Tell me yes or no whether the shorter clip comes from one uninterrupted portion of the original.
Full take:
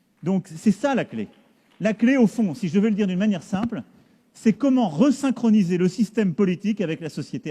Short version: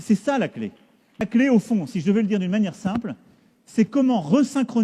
no